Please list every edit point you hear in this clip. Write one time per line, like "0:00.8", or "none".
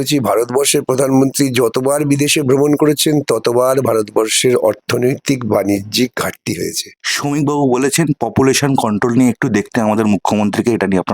0:06.9